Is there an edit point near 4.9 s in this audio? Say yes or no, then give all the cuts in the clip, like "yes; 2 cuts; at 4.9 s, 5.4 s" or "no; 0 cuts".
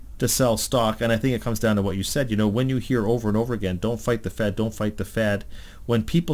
no; 0 cuts